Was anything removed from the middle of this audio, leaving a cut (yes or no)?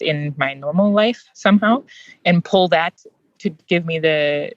no